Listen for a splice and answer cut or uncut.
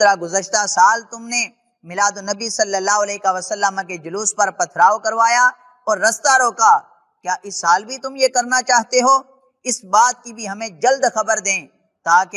uncut